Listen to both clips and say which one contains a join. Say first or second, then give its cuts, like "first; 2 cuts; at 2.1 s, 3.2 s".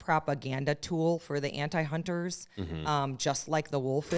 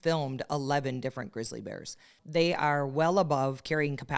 second; 1 cut; at 2.1 s